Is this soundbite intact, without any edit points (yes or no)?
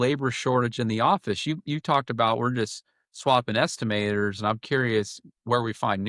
yes